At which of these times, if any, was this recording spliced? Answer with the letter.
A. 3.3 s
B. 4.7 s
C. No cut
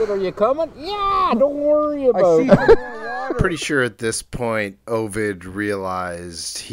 A